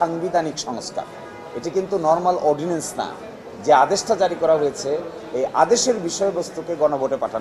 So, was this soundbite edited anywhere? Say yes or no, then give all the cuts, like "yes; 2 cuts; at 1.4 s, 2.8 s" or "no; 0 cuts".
no; 0 cuts